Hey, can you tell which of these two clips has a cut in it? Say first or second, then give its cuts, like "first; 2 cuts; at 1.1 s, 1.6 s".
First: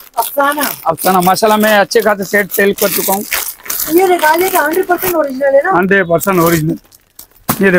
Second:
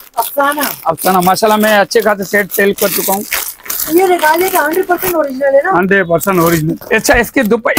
second; 1 cut; at 6.8 s